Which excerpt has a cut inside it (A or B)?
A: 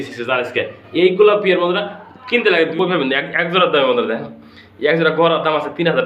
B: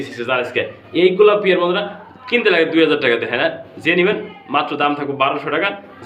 A